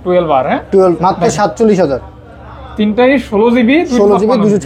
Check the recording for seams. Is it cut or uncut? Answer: cut